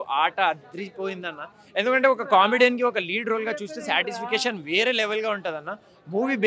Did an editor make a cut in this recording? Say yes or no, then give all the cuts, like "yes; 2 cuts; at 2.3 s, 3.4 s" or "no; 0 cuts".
no; 0 cuts